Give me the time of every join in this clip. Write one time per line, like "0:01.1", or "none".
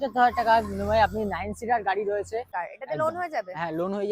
0:02.5